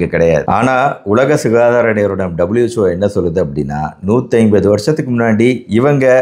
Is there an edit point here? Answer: no; 0 cuts

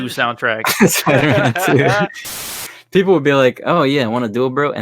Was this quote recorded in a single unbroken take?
no; 1 cut; at 2.5 s

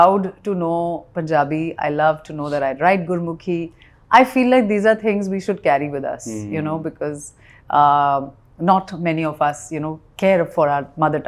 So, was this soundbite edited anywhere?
no; 0 cuts

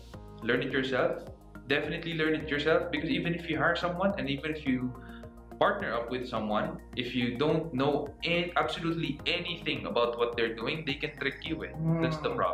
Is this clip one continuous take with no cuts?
yes; 0 cuts

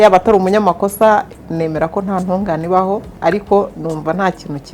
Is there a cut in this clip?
yes; 1 cut; at 3.2 s

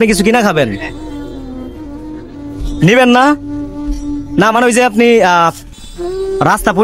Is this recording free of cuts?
yes; 0 cuts

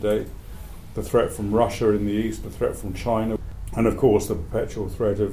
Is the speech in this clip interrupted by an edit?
yes; 1 cut; at 3.4 s

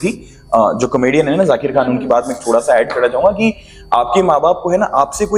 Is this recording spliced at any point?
no; 0 cuts

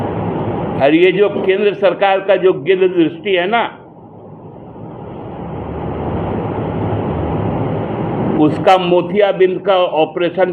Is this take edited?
no; 0 cuts

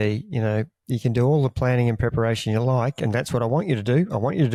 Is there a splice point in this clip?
no; 0 cuts

